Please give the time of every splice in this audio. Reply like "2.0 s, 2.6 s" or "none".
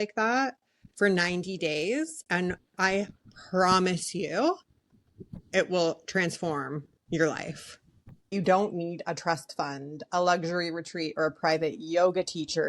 8.3 s